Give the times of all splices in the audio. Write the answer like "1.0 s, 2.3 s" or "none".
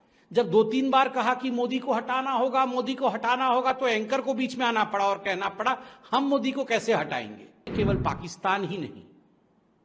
7.7 s